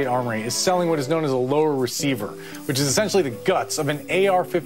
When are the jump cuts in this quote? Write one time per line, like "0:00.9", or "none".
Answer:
none